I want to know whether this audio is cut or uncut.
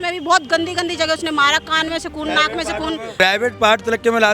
cut